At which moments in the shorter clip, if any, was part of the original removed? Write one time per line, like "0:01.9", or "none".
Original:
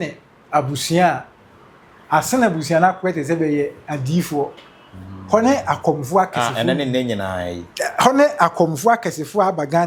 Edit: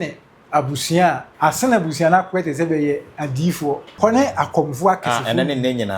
0:01.3
0:03.9